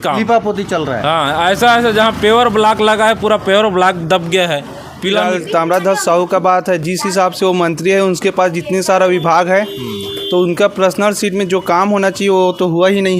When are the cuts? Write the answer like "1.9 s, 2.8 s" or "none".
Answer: 5.2 s